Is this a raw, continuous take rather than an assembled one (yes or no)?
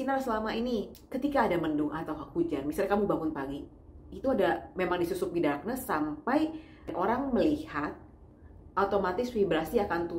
no